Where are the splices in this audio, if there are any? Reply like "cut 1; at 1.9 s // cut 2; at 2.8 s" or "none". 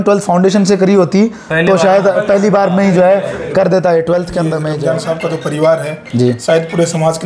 cut 1; at 4.7 s